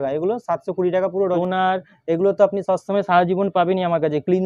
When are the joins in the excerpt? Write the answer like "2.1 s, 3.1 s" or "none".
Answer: 1.4 s